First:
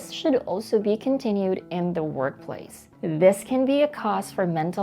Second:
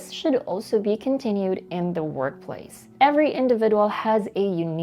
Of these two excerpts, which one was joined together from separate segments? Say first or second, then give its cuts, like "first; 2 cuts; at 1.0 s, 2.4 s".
first; 1 cut; at 2.8 s